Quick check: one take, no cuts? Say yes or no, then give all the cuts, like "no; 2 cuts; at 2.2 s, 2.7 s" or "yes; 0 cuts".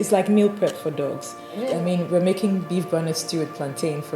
no; 1 cut; at 1.7 s